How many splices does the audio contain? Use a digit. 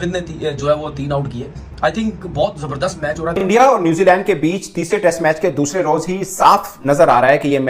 1